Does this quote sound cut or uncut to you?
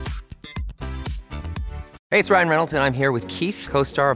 cut